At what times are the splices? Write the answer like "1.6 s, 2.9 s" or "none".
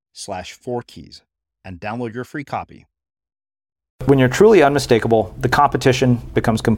4.0 s

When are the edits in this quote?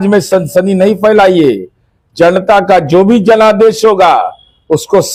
none

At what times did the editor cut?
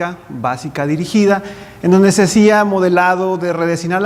none

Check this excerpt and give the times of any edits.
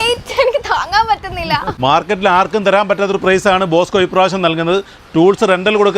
1.8 s

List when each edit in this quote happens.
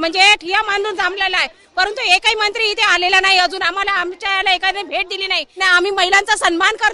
5.6 s

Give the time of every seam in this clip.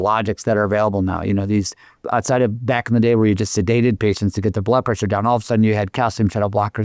none

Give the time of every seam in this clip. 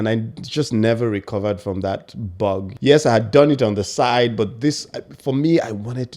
2.7 s

